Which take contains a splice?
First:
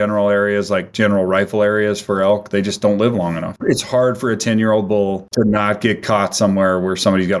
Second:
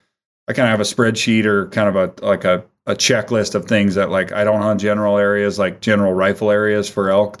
first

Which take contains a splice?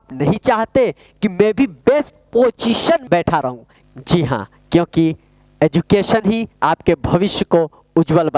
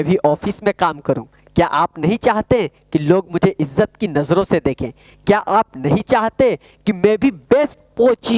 first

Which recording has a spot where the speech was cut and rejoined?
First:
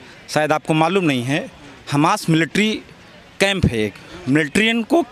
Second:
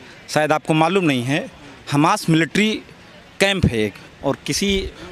first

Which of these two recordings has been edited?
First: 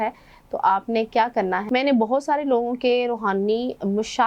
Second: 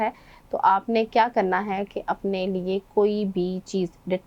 first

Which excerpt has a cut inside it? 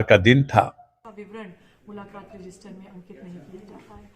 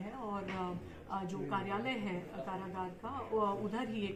first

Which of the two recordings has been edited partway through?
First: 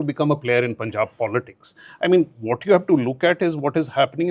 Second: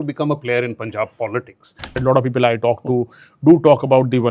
second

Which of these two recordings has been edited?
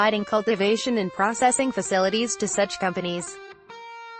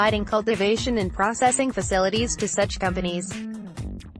first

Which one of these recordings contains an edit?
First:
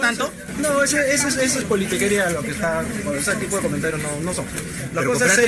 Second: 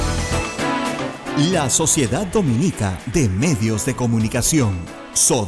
second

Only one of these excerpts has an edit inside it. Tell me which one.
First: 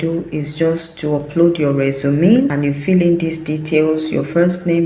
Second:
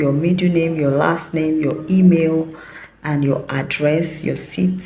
first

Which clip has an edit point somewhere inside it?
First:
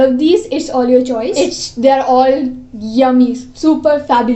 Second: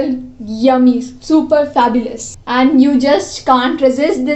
first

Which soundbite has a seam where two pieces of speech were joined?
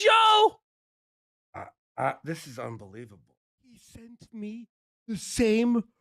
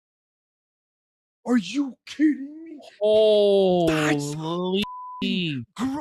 first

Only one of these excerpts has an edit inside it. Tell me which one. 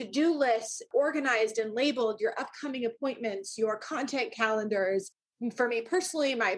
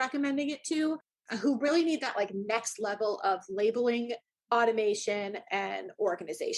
first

